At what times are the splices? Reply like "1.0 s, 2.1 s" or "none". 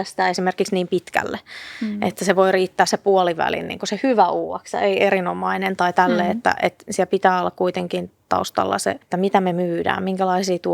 9.0 s